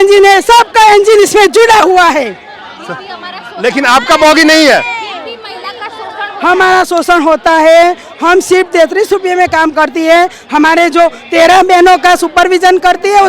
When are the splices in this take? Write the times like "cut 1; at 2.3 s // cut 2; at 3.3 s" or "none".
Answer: none